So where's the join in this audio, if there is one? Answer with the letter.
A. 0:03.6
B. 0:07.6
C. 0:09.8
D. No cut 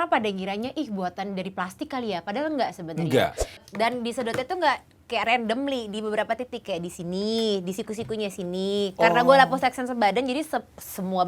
A